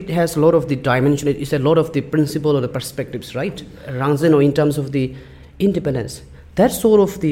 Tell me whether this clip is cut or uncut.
cut